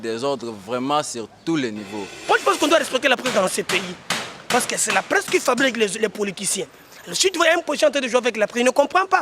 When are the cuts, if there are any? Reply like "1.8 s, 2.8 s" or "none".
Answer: 2.1 s